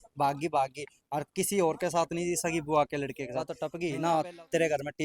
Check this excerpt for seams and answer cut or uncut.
cut